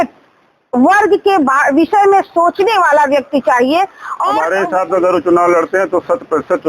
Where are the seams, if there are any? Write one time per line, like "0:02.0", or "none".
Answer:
0:04.4